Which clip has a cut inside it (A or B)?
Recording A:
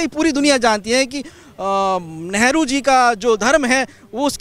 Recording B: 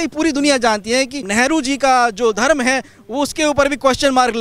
B